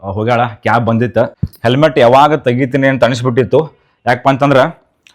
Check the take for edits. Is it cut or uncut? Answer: cut